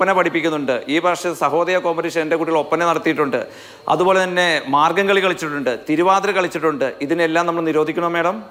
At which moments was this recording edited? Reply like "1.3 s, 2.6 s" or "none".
none